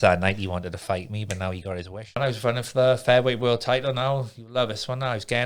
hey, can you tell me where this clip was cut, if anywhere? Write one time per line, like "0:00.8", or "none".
0:02.2